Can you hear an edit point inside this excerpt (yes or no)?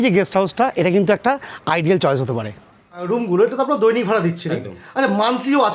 yes